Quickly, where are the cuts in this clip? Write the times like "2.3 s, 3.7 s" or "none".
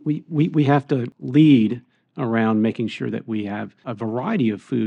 3.8 s